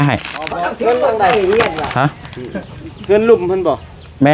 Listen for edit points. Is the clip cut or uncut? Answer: uncut